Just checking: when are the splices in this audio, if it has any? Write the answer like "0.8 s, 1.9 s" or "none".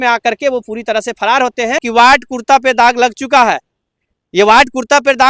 1.8 s

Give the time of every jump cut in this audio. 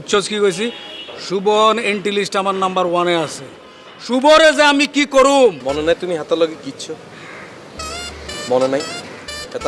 5.6 s

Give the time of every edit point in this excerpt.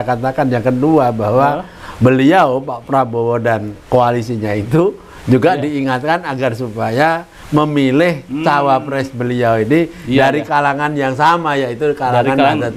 none

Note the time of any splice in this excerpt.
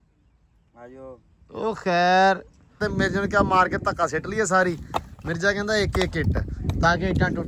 2.8 s

